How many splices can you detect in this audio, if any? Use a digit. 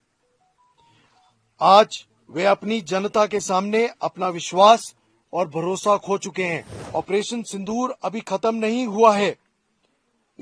1